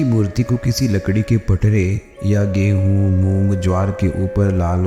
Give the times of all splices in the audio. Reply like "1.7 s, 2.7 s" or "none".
none